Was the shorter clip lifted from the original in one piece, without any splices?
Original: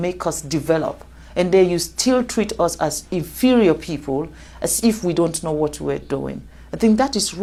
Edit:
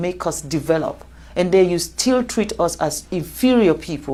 yes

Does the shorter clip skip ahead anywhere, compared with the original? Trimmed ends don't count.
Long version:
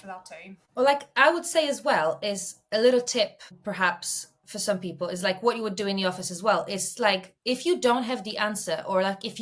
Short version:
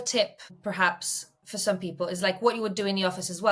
no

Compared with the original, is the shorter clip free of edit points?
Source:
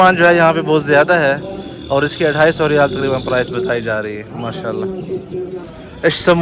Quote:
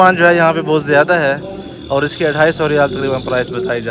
yes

